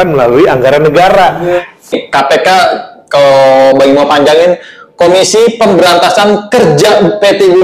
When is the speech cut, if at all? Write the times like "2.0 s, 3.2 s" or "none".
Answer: 1.6 s